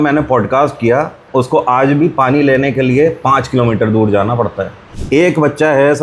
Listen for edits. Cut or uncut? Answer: cut